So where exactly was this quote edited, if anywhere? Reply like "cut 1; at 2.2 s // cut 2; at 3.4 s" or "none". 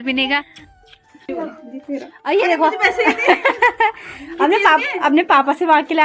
cut 1; at 1.3 s